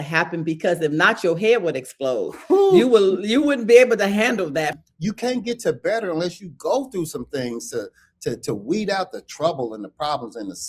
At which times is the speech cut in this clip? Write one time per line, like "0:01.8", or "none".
0:04.7